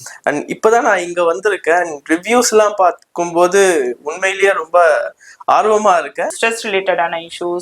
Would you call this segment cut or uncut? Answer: cut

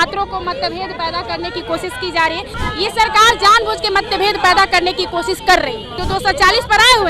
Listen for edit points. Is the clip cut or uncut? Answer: cut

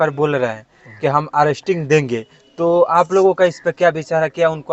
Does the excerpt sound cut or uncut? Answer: uncut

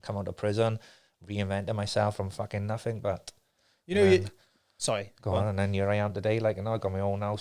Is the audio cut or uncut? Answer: uncut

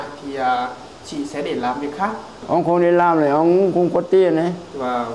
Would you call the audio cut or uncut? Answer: cut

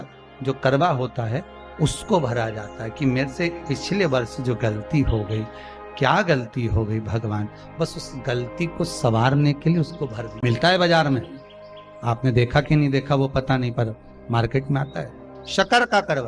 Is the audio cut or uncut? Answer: cut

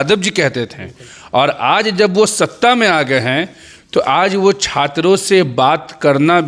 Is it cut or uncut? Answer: uncut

